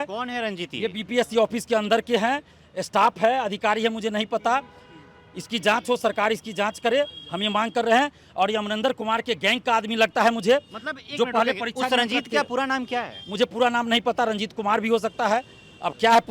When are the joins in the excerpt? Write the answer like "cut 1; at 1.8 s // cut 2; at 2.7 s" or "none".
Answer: none